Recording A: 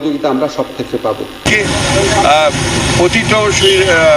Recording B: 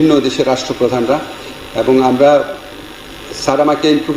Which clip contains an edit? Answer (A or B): A